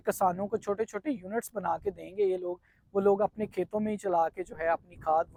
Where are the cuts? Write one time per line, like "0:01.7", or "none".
none

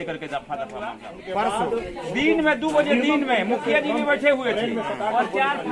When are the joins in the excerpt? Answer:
0:01.1

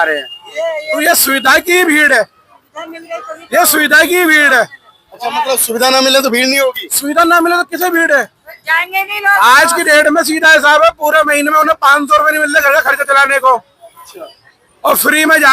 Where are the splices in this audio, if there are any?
0:01.0

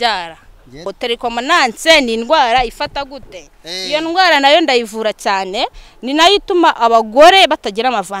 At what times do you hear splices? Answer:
0:00.9

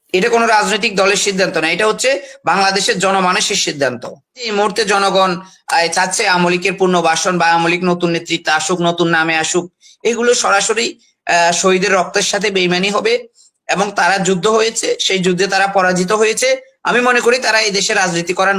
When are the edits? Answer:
0:04.4

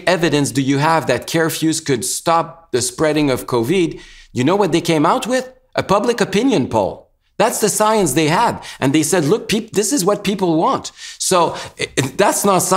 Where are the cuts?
none

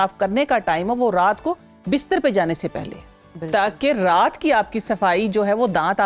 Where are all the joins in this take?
none

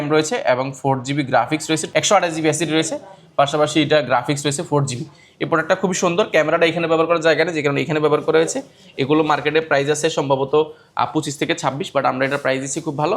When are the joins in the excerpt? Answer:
0:01.8

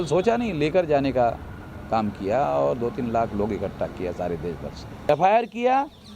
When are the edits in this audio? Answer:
0:05.1

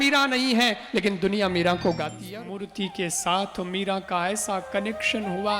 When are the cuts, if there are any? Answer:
0:02.2

